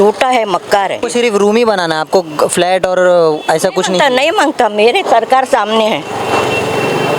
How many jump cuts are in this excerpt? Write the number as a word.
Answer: one